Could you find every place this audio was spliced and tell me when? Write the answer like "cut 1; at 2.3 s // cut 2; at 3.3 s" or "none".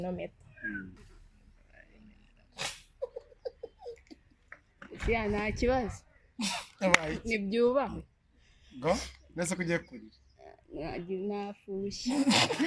cut 1; at 1.0 s

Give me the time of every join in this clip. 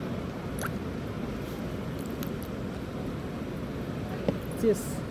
none

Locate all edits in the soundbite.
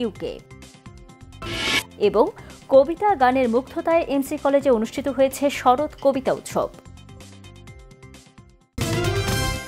cut 1; at 8.7 s

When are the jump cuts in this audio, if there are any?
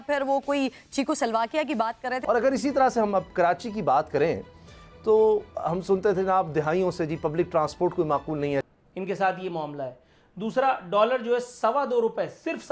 cut 1; at 2.1 s // cut 2; at 8.7 s

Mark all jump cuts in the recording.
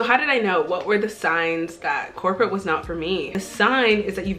cut 1; at 3.3 s

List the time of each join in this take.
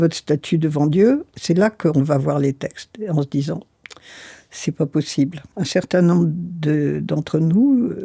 cut 1; at 1.3 s // cut 2; at 5.4 s

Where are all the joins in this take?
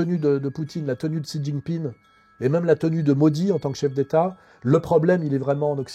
none

